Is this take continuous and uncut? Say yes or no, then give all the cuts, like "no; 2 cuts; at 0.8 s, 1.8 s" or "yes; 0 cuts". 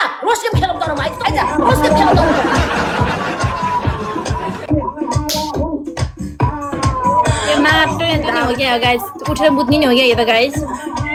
yes; 0 cuts